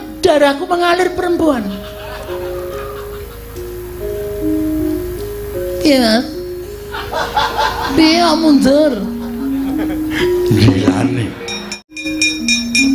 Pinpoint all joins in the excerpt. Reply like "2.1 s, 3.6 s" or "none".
12.0 s